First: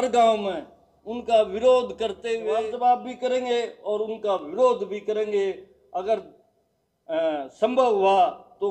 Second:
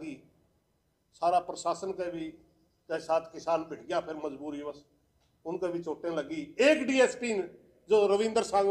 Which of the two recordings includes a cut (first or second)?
first